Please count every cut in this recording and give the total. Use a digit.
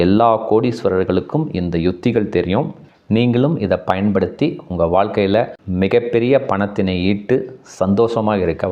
0